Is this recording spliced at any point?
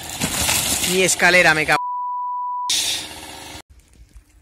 no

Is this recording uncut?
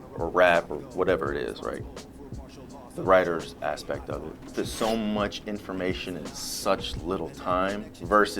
no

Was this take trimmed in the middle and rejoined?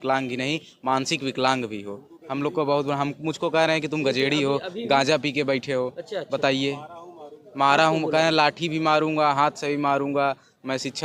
no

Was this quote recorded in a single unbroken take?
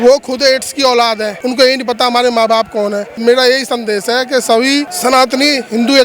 no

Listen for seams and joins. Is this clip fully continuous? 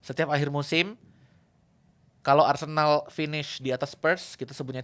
yes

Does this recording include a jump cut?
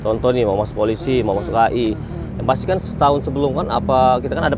no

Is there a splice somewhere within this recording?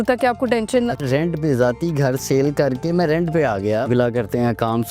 yes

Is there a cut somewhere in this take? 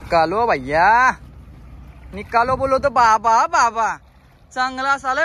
no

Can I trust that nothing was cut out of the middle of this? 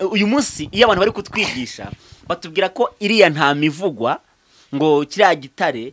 yes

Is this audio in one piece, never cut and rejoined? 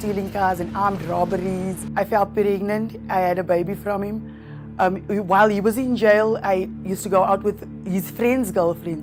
yes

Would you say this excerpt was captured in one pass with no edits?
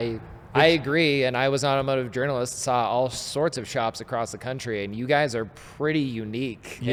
yes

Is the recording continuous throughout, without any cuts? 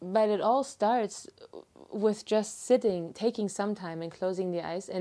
yes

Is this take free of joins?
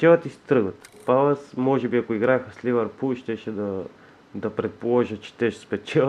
no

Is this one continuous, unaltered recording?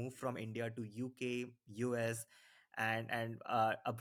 yes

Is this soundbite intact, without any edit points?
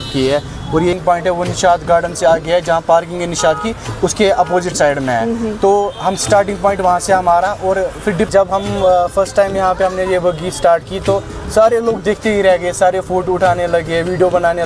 no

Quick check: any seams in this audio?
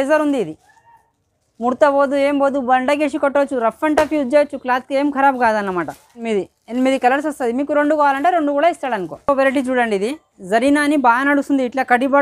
yes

